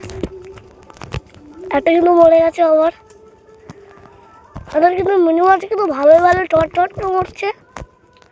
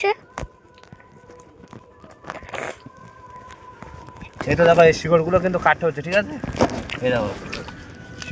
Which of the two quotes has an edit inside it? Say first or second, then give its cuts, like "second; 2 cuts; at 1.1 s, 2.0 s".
second; 1 cut; at 4.4 s